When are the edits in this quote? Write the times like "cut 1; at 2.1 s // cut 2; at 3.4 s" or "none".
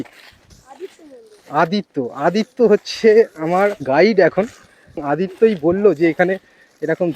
cut 1; at 5.0 s